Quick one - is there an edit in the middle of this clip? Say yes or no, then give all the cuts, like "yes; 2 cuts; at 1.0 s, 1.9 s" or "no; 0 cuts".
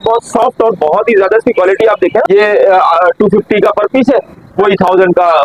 yes; 1 cut; at 2.3 s